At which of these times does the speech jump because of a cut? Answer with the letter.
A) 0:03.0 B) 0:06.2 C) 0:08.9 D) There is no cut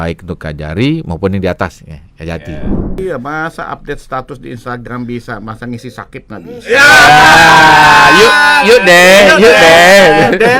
A